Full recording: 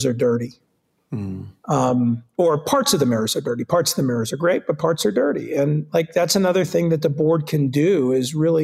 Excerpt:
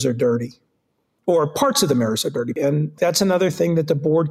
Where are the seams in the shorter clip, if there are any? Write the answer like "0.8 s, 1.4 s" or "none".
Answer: 1.1 s, 2.7 s